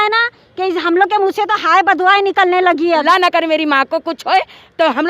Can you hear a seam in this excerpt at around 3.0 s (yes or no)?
yes